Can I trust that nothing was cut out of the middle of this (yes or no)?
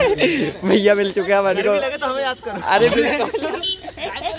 yes